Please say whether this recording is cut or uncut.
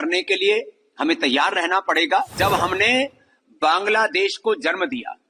cut